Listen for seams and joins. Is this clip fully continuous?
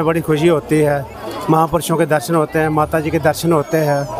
yes; 0 cuts

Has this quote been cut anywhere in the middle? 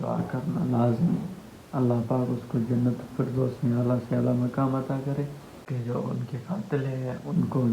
yes; 1 cut; at 5.5 s

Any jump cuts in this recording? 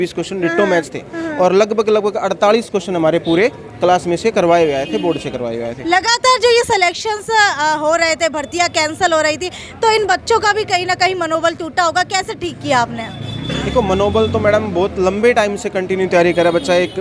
no; 0 cuts

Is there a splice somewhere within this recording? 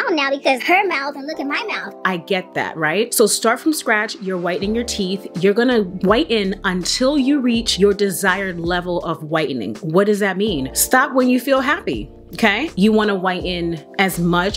no; 0 cuts

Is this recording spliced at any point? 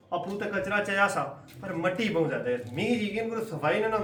no; 0 cuts

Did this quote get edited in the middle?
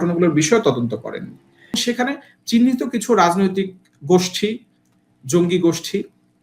yes; 1 cut; at 1.8 s

